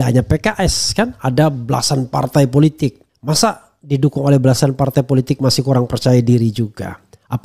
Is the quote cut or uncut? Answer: uncut